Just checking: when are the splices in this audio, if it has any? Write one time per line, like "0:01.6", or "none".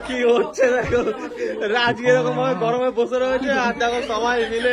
none